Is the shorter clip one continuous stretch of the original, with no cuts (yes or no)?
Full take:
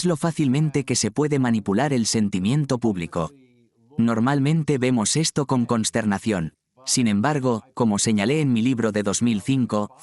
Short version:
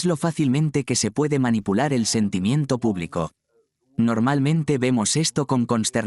yes